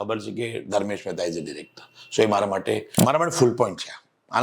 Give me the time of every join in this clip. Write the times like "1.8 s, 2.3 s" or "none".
3.0 s